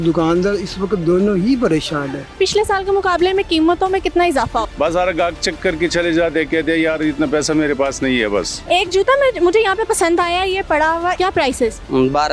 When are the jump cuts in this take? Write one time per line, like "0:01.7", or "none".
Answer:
0:02.2
0:04.7
0:08.6
0:11.2

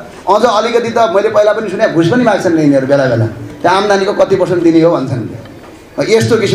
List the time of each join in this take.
none

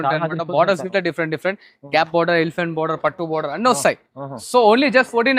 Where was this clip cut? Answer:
none

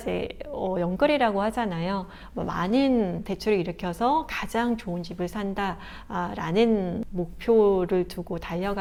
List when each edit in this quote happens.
none

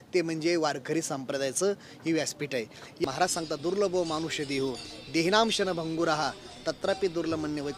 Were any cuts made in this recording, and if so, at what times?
0:03.0

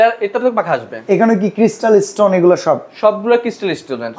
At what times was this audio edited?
none

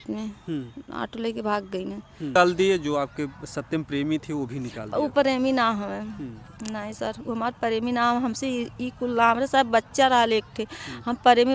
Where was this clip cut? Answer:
0:02.3

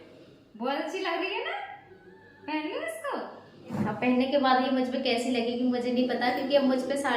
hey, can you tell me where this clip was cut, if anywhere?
0:03.7

